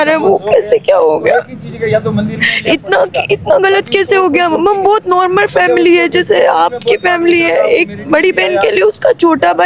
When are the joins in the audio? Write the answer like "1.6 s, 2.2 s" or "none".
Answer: none